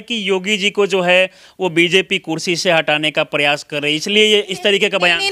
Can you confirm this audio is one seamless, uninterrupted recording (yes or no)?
yes